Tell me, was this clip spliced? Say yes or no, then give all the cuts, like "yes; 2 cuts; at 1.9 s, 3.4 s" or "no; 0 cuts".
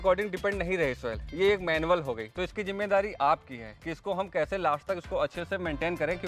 no; 0 cuts